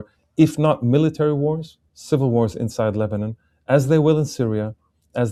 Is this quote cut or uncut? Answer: uncut